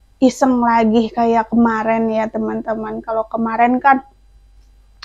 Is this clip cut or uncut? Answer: uncut